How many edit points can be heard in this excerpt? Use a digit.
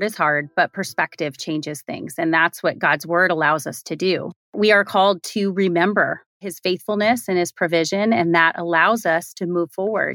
1